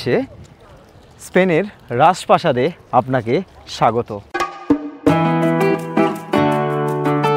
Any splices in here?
yes; 1 cut; at 4.2 s

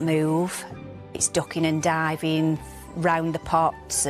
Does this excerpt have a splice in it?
yes; 1 cut; at 1.0 s

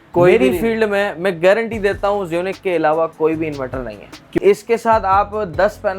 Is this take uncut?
no; 1 cut; at 4.4 s

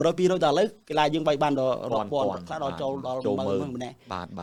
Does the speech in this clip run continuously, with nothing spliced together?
yes; 0 cuts

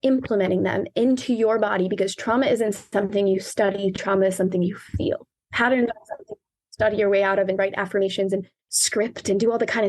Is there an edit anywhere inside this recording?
yes; 2 cuts; at 5.3 s, 8.6 s

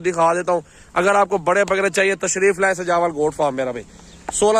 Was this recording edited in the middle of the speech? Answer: no; 0 cuts

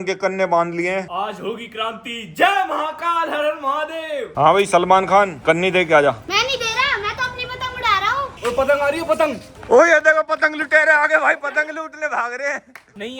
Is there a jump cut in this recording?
yes; 3 cuts; at 1.1 s, 4.3 s, 8.3 s

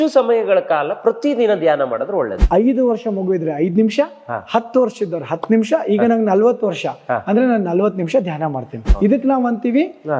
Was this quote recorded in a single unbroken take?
no; 2 cuts; at 2.4 s, 8.8 s

